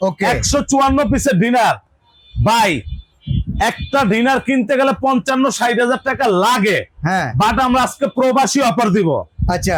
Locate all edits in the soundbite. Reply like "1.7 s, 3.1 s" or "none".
none